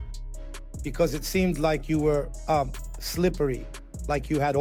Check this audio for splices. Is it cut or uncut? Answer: uncut